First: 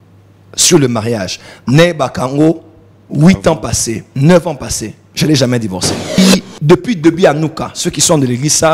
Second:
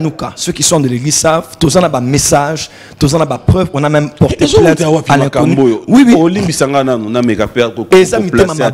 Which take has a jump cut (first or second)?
first